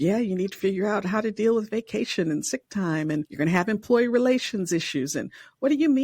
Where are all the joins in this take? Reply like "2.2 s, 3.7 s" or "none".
3.3 s